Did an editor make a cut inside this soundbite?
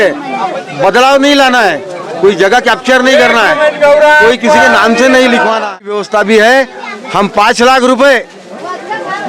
yes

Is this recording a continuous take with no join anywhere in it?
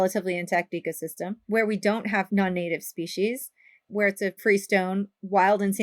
no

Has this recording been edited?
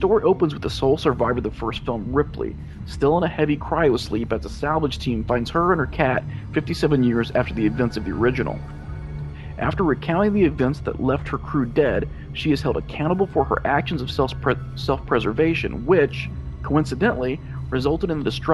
no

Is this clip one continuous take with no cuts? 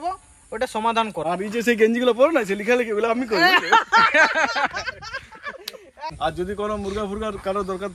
no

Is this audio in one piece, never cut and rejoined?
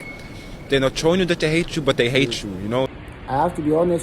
no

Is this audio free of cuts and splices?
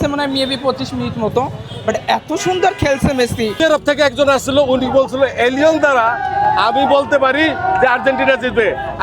no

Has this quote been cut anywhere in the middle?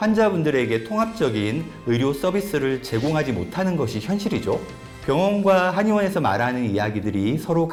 no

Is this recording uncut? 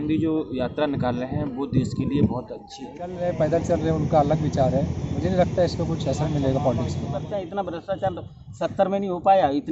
no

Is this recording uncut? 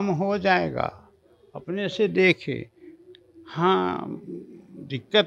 yes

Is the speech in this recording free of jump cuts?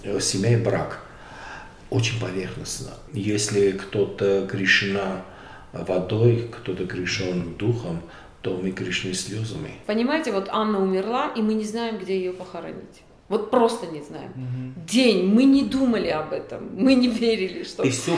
no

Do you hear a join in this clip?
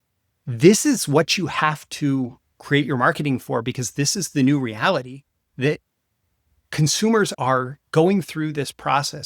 yes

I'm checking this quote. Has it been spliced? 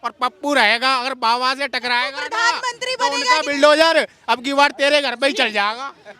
no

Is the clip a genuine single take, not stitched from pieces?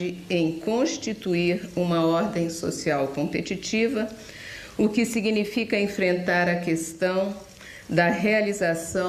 yes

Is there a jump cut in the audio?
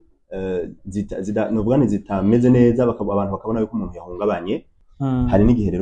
yes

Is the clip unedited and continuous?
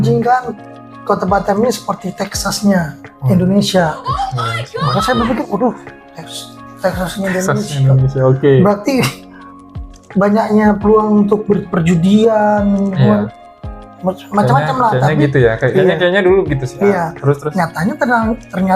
yes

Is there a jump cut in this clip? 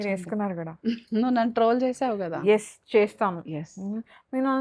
no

